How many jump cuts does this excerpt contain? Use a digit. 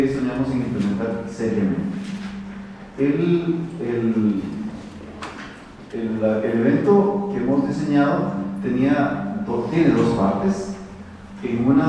1